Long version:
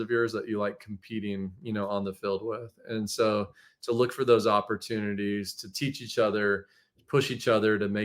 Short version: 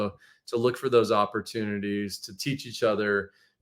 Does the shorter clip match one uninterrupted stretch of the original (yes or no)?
yes